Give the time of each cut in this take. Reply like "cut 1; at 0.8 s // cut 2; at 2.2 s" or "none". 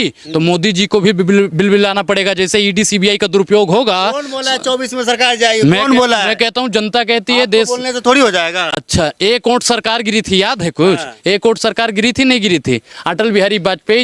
none